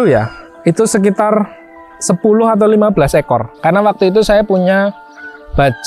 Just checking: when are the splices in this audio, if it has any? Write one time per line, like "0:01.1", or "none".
0:03.5